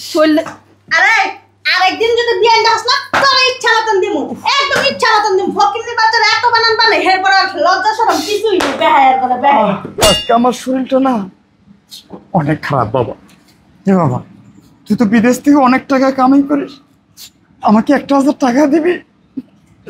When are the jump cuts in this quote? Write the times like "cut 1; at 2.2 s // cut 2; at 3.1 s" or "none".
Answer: cut 1; at 10.0 s